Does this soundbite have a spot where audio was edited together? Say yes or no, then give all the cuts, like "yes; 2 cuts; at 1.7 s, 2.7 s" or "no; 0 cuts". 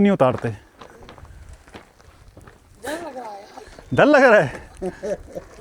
no; 0 cuts